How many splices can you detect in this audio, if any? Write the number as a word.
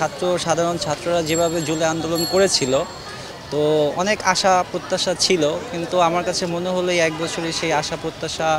zero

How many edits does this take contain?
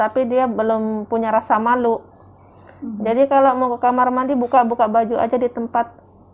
zero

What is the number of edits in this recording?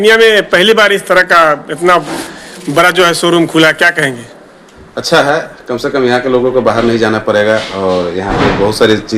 zero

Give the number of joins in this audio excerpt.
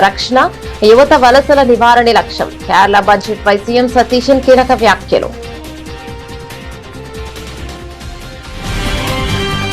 one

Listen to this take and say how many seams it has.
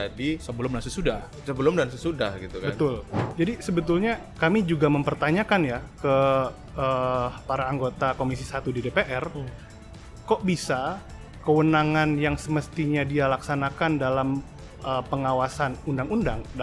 one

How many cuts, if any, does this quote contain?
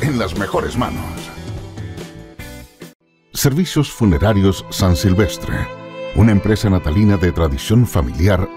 one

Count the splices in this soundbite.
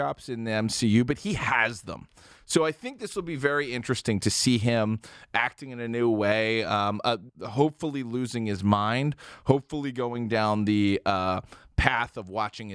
one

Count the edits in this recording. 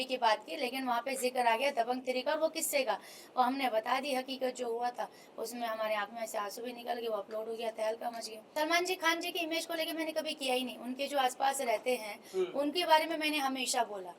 one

